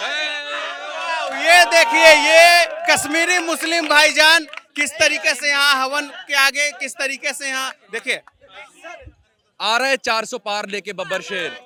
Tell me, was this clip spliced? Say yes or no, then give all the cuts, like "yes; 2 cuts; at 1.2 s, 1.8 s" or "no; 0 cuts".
no; 0 cuts